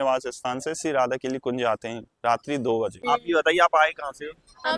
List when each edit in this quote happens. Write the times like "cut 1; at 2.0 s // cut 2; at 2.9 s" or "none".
cut 1; at 3.0 s